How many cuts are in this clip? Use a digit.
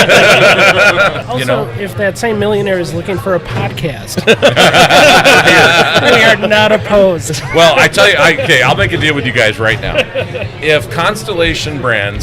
1